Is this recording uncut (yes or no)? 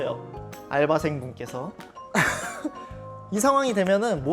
no